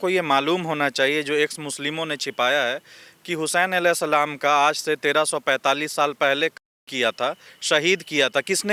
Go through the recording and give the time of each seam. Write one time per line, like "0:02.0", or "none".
none